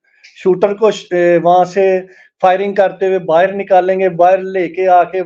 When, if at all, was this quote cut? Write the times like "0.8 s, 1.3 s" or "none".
none